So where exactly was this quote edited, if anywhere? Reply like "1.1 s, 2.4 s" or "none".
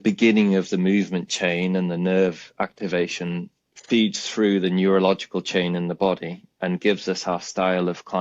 none